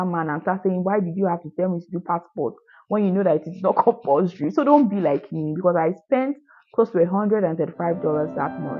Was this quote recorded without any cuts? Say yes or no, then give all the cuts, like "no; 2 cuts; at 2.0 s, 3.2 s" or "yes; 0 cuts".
yes; 0 cuts